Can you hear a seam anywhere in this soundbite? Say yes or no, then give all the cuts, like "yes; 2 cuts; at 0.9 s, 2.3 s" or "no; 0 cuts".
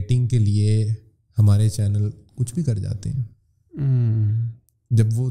no; 0 cuts